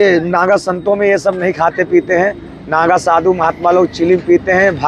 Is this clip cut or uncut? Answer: uncut